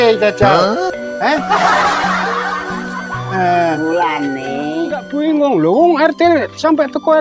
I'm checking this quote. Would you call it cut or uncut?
cut